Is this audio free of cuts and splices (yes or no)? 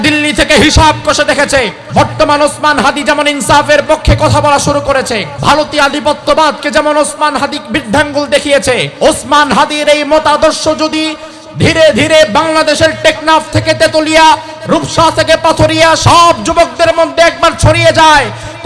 no